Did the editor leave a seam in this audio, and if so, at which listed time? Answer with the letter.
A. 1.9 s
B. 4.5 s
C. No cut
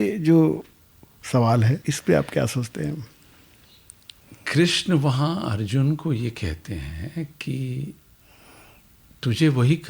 A